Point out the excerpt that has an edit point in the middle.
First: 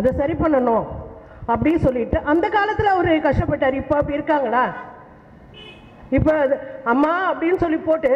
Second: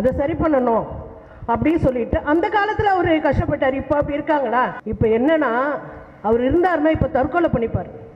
second; 1 cut; at 4.8 s

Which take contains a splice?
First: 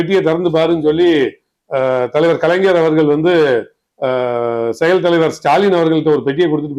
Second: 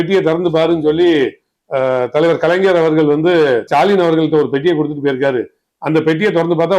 second; 1 cut; at 3.7 s

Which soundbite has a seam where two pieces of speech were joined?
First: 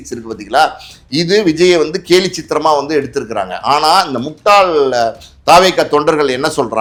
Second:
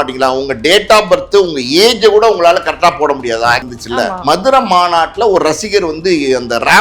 second; 1 cut; at 3.7 s

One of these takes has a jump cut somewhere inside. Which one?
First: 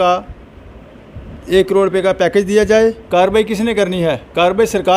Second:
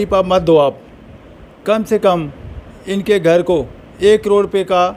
first; 1 cut; at 3.0 s

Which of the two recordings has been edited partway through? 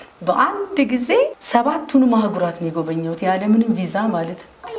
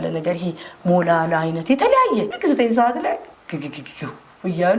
second; 1 cut; at 2.3 s

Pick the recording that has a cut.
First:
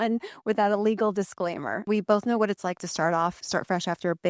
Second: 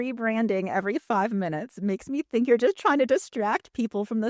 first; 2 cuts; at 1.9 s, 3.4 s

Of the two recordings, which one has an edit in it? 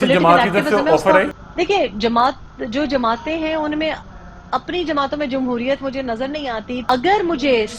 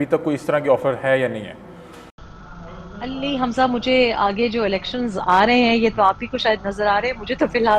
first; 2 cuts; at 1.4 s, 6.8 s

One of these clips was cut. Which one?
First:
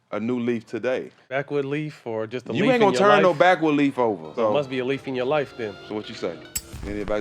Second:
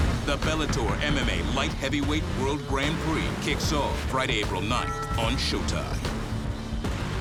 first; 3 cuts; at 1.3 s, 4.3 s, 5.8 s

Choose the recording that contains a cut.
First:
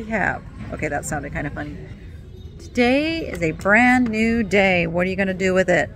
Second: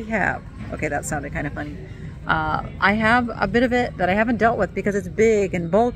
first; 1 cut; at 2.0 s

